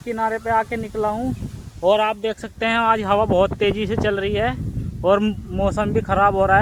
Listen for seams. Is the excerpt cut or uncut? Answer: uncut